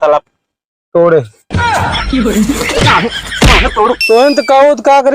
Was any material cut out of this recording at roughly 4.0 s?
yes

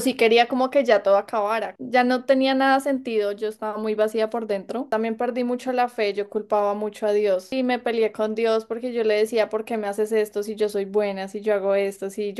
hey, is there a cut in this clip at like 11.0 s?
no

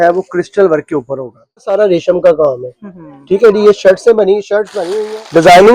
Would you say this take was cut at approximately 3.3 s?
no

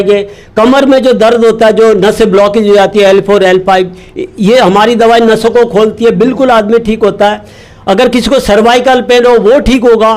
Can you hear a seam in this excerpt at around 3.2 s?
no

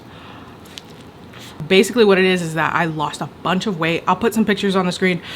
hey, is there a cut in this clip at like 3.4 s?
no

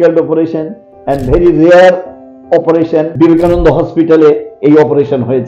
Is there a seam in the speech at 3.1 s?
yes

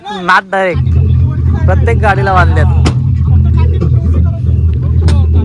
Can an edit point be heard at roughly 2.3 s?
no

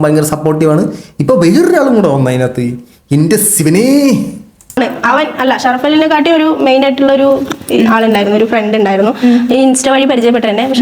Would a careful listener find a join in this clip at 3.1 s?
no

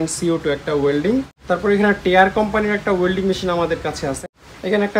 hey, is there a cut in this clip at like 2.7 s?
no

